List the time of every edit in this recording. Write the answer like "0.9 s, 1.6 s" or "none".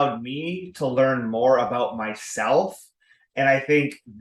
none